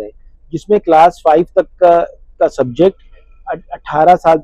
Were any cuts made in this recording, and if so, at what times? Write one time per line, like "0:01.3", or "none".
none